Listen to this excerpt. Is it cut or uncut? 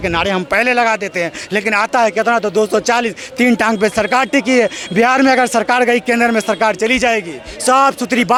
uncut